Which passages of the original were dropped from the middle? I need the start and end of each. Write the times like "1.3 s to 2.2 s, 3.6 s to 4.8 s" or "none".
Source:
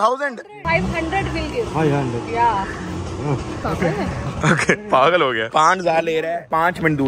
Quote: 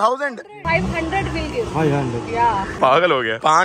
2.7 s to 4.8 s

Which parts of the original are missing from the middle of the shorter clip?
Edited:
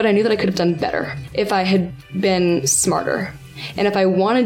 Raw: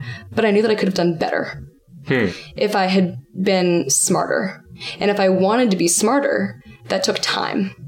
1.6 s to 2.4 s

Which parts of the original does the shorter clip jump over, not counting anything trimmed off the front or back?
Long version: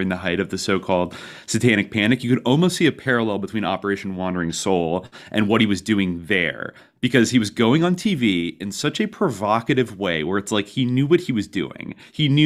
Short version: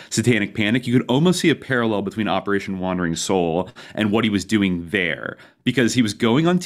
none

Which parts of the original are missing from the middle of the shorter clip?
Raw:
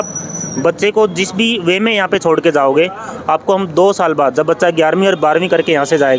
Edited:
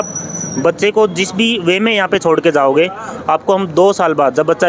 none

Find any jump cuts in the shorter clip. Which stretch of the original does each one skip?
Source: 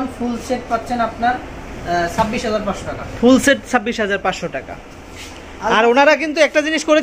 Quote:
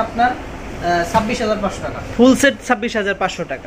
none

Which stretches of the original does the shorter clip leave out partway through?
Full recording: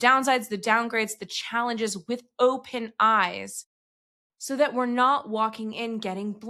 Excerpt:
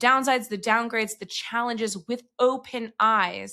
none

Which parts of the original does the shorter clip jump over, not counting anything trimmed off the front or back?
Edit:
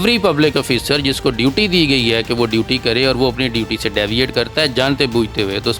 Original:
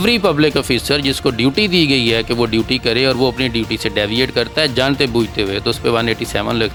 none

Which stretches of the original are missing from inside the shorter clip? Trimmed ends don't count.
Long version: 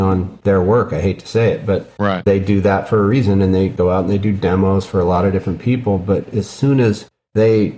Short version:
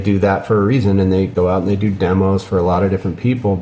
none

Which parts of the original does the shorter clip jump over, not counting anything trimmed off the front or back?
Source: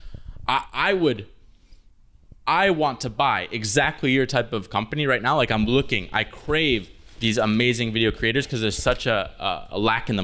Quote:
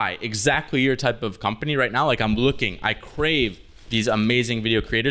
none

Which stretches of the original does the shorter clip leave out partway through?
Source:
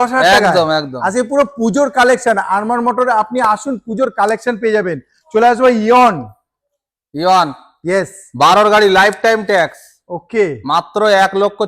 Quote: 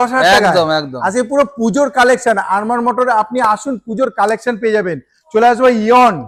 none

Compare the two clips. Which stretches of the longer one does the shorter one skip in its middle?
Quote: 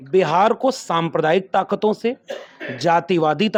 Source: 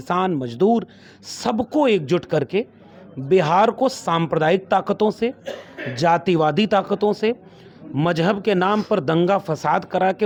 none

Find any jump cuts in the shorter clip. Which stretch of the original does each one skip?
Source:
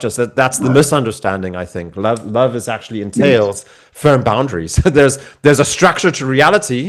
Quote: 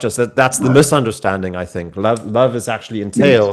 none

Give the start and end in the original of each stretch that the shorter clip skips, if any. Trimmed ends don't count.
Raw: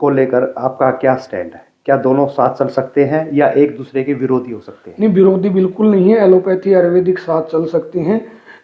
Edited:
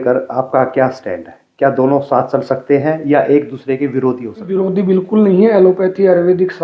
4.8 s to 5.2 s

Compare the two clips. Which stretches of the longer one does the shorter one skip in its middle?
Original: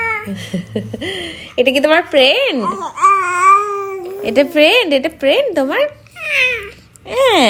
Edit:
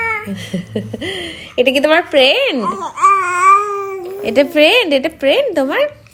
none

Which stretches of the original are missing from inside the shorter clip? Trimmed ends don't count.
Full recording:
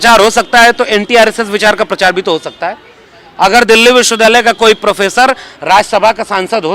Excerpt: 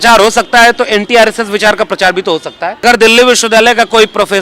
2.8 s to 3.5 s

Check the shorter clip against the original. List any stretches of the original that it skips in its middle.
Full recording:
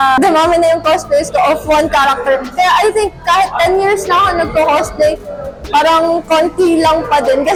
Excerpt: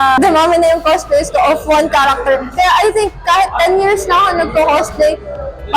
none

